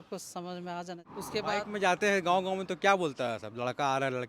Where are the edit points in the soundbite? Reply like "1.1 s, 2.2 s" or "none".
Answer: 1.1 s